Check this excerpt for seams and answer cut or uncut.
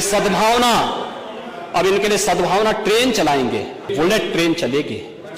cut